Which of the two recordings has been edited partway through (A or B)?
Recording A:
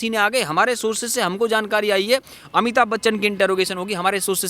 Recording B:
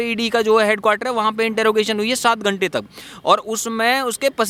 A